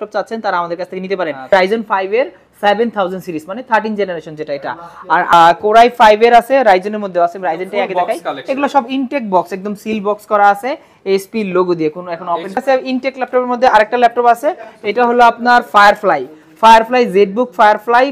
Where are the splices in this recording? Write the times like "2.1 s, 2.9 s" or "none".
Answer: 1.5 s, 5.3 s, 12.6 s